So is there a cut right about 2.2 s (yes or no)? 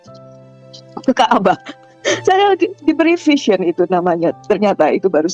yes